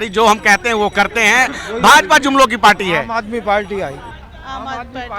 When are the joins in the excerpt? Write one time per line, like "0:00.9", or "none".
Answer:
0:04.1

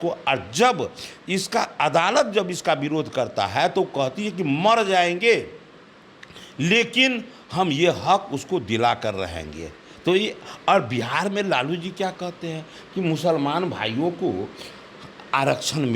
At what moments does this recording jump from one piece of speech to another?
none

